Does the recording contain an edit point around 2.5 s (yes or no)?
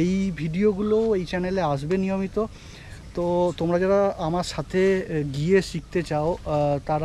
no